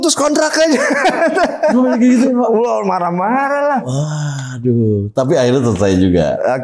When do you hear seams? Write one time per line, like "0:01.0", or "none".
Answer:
none